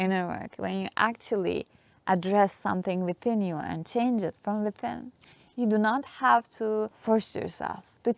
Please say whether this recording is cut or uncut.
uncut